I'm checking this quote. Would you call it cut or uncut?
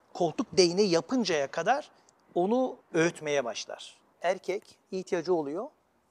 cut